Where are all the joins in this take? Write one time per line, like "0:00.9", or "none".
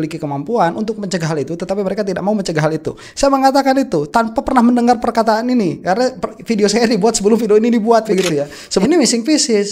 0:08.8